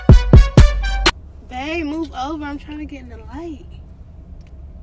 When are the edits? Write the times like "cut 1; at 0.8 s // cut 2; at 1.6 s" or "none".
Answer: none